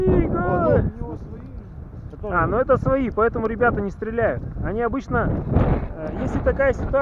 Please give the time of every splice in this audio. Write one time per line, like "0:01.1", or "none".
none